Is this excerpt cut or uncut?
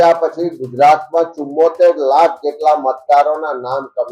uncut